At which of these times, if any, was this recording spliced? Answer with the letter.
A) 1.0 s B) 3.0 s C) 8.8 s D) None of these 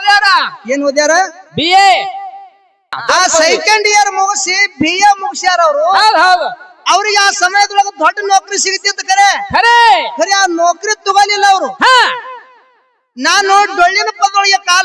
B